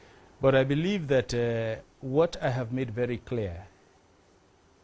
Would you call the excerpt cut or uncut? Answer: uncut